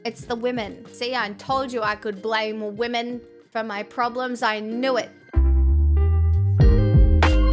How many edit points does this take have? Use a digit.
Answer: 3